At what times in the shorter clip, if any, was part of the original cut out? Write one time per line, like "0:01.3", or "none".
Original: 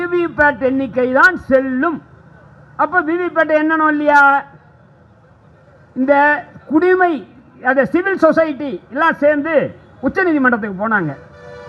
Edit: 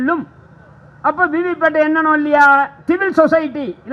0:02.8